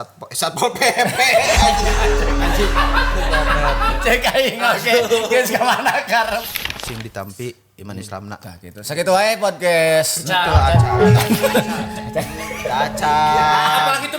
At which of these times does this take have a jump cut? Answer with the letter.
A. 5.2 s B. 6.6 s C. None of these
B